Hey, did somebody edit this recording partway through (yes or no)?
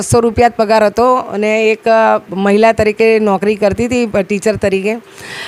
no